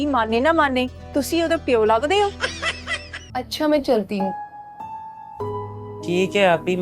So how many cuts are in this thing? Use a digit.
1